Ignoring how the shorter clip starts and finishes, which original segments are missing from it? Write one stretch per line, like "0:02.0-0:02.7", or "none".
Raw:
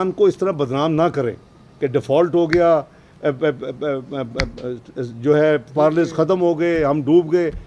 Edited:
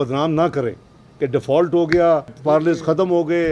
0:03.0-0:05.7